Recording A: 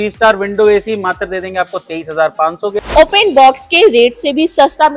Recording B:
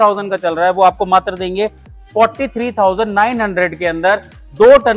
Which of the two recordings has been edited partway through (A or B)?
A